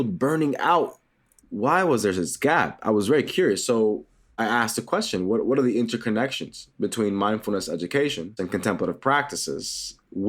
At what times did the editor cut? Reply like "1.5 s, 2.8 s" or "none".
1.2 s, 4.4 s, 8.3 s